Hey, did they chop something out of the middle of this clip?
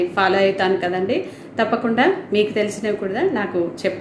no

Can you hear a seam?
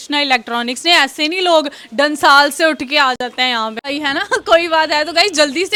no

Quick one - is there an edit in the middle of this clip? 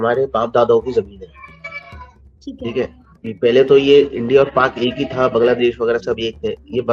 no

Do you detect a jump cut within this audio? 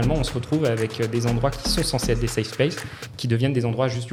no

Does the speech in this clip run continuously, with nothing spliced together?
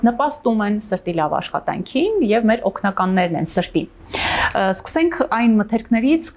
yes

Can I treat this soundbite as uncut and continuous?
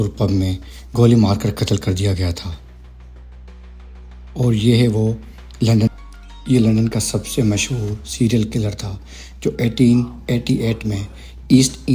no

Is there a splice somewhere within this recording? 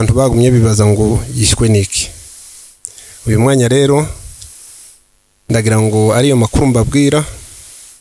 no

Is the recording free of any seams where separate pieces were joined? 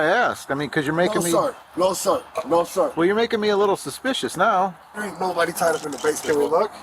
no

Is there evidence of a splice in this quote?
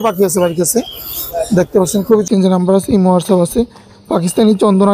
yes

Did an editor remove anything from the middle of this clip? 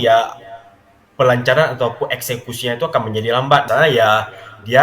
yes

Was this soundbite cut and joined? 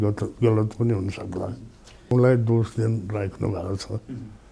yes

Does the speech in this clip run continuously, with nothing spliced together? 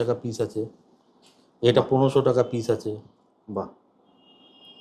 yes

